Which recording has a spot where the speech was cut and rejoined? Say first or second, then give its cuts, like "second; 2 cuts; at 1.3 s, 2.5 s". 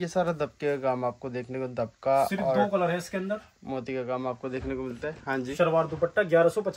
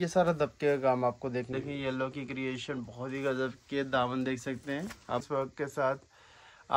second; 2 cuts; at 1.5 s, 5.3 s